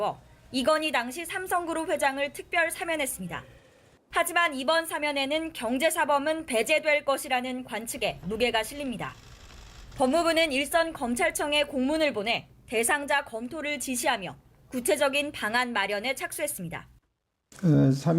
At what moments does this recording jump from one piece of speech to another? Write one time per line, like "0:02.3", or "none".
0:01.4